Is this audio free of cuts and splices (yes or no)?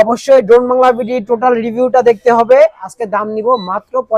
no